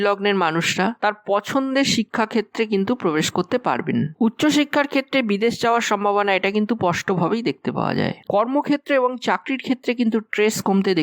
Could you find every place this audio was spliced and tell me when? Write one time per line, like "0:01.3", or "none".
0:08.2